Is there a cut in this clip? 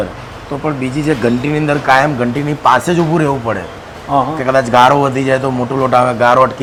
no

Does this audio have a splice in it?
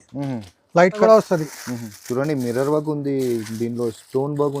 yes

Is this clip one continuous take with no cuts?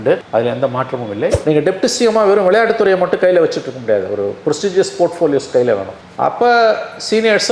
no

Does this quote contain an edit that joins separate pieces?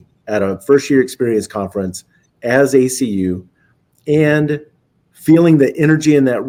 no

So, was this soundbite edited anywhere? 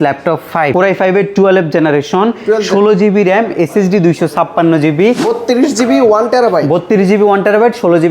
yes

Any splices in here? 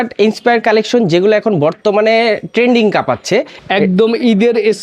yes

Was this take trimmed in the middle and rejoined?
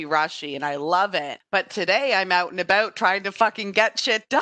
yes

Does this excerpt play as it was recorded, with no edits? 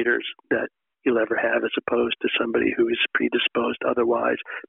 yes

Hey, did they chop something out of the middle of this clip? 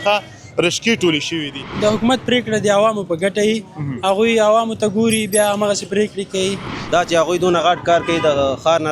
yes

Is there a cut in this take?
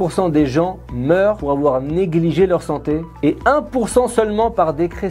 no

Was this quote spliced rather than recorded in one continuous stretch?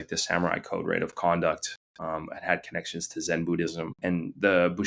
yes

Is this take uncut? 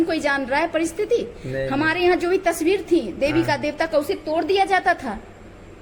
yes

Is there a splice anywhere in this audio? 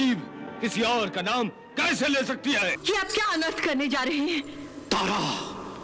yes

